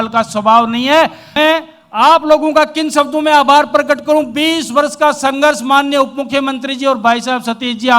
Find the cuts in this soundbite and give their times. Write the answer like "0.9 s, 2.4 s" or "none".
1.2 s